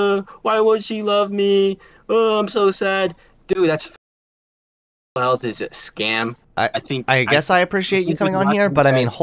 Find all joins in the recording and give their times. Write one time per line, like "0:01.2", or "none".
0:06.4

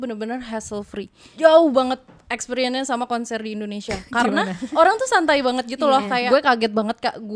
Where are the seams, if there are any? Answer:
0:04.7
0:06.2

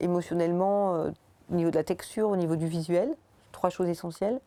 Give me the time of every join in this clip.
none

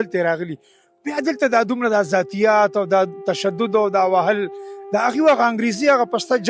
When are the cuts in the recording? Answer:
none

